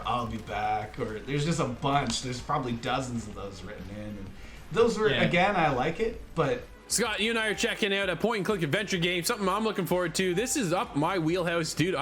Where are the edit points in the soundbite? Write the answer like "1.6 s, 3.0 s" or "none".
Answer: 6.8 s